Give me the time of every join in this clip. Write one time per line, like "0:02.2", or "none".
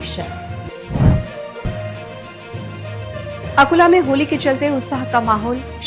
none